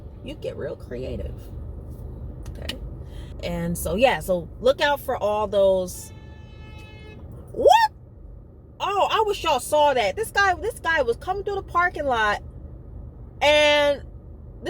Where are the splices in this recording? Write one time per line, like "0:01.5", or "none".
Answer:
0:02.8